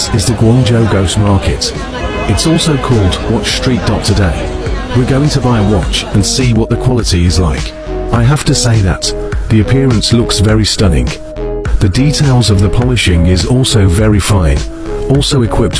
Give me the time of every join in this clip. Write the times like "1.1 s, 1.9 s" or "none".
none